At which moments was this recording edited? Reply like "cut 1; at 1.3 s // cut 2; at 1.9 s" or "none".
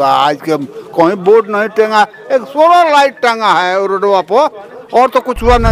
none

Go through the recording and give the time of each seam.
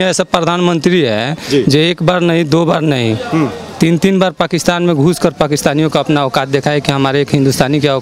none

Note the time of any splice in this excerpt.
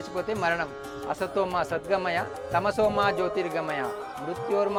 none

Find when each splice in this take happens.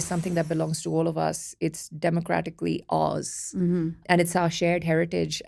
cut 1; at 4.0 s

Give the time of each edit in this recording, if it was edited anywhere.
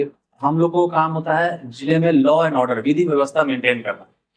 none

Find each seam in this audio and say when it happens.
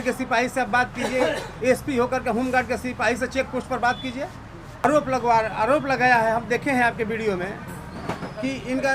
cut 1; at 4.8 s

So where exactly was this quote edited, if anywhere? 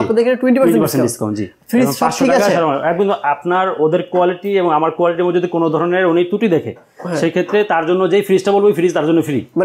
none

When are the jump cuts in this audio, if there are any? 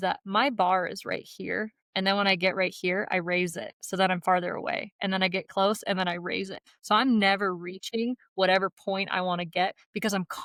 none

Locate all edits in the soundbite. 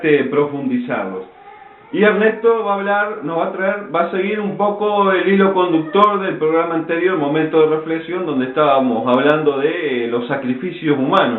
cut 1; at 10.1 s

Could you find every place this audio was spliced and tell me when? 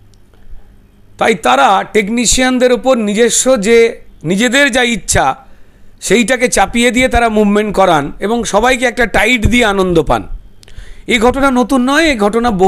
none

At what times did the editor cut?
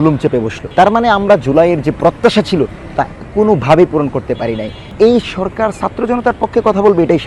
cut 1; at 4.9 s

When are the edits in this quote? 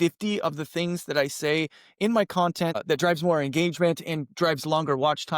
cut 1; at 2.8 s

